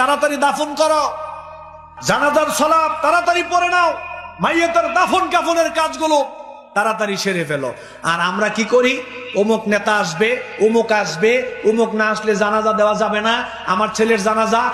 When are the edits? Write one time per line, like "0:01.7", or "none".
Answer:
none